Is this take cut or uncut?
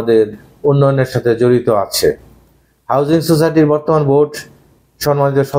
uncut